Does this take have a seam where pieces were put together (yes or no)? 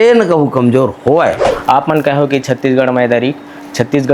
yes